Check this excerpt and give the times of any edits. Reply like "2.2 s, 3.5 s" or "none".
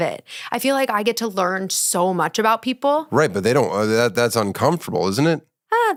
none